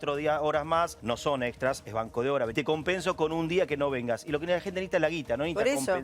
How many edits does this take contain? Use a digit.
2